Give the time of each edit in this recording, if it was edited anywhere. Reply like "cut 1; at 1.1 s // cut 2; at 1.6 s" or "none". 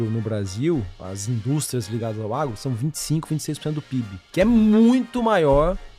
cut 1; at 1.0 s // cut 2; at 4.2 s